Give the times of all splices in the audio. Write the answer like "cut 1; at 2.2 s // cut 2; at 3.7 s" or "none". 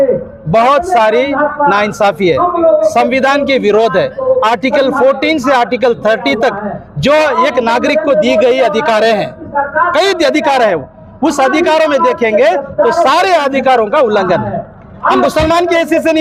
none

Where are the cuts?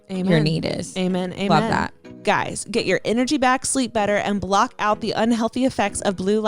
cut 1; at 2.1 s

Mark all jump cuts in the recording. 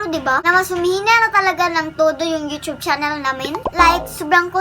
none

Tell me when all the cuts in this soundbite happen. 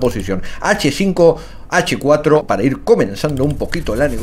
cut 1; at 2.4 s

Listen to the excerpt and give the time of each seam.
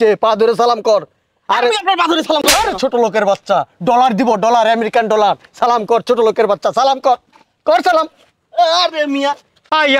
none

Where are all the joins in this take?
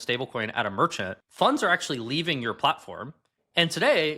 cut 1; at 1.2 s

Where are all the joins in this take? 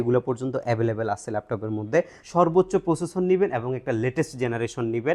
cut 1; at 2.2 s

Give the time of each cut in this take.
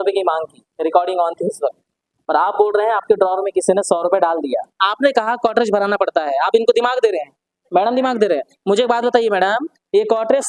cut 1; at 4.8 s

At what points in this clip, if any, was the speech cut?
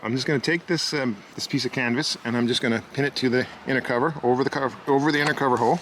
cut 1; at 1.3 s

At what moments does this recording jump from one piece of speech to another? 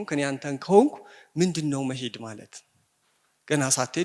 none

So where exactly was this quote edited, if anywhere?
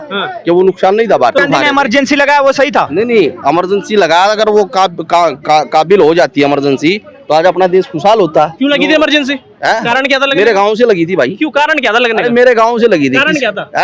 cut 1; at 1.4 s

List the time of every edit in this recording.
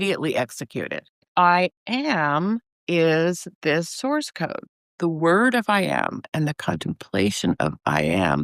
cut 1; at 1.3 s // cut 2; at 4.6 s

